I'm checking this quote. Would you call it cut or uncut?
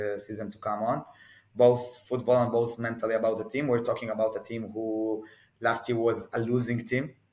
uncut